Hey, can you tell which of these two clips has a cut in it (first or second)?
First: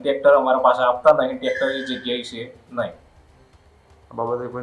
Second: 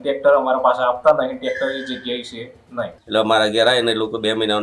second